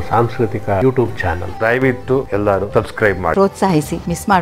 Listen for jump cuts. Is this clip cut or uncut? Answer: cut